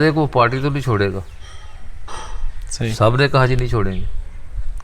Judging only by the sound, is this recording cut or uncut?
uncut